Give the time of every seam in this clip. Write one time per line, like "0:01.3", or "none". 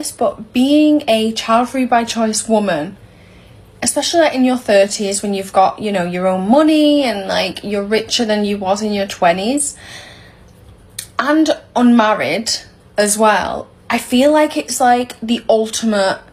none